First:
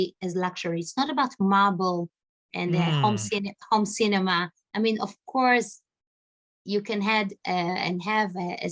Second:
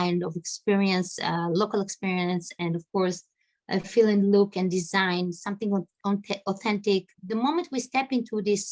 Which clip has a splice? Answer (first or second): second